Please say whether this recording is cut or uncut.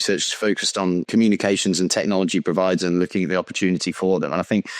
cut